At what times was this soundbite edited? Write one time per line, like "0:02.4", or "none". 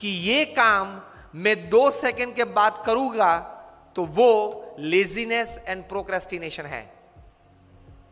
0:07.0